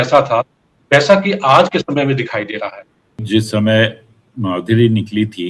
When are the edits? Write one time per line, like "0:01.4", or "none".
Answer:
0:03.2